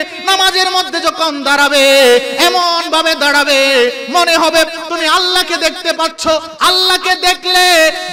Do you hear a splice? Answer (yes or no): no